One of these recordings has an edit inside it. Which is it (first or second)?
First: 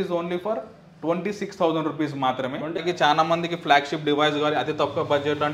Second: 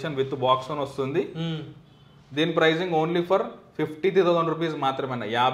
first